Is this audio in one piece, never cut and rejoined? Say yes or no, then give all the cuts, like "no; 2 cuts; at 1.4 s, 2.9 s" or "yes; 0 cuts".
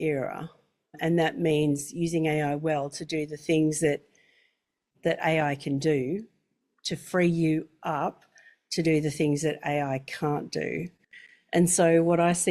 yes; 0 cuts